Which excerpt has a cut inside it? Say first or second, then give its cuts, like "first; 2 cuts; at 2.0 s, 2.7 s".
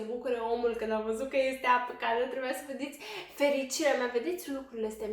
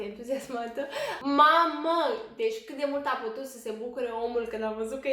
second; 1 cut; at 1.2 s